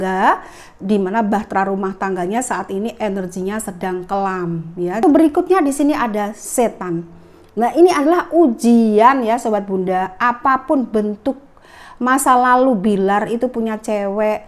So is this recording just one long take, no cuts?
no; 1 cut; at 5.0 s

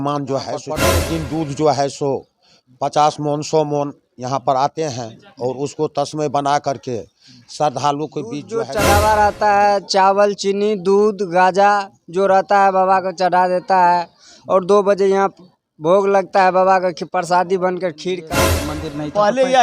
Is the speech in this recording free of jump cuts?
no; 3 cuts; at 0.9 s, 8.5 s, 18.2 s

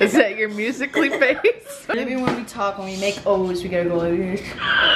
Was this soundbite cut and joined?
yes; 1 cut; at 1.9 s

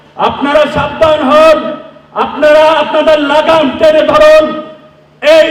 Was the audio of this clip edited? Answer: no; 0 cuts

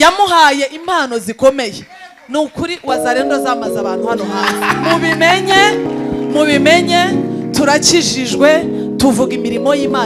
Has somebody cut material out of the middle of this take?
no; 0 cuts

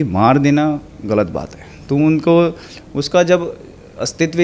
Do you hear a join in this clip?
no; 0 cuts

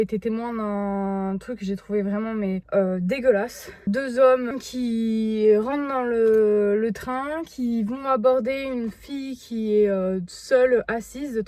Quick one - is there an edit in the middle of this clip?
no; 0 cuts

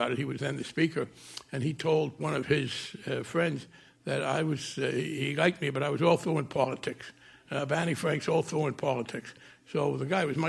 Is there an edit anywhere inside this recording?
yes; 2 cuts; at 2.2 s, 5.1 s

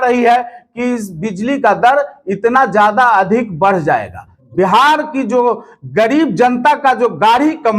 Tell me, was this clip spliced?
yes; 1 cut; at 4.4 s

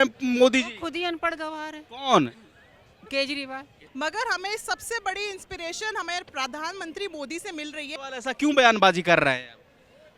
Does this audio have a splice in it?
yes; 2 cuts; at 3.8 s, 7.9 s

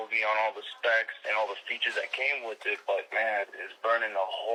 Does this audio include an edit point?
no; 0 cuts

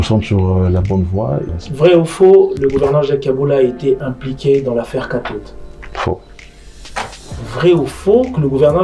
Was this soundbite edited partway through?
yes; 1 cut; at 1.5 s

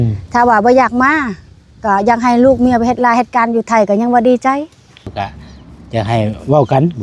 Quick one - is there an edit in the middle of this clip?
yes; 1 cut; at 5.1 s

